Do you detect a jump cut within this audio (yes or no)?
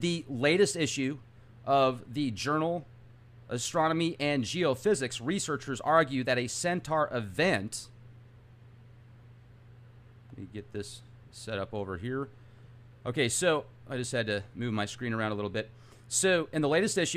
yes